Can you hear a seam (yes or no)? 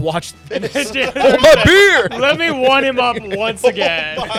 no